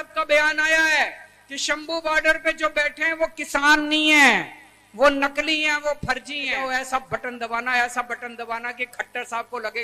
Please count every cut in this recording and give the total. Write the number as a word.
one